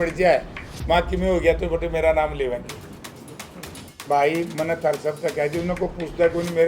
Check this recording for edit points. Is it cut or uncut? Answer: cut